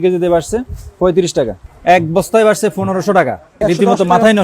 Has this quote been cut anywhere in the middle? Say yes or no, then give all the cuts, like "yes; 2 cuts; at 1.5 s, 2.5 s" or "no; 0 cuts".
yes; 2 cuts; at 1.7 s, 3.5 s